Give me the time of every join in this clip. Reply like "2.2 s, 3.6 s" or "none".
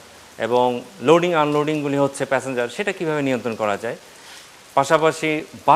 none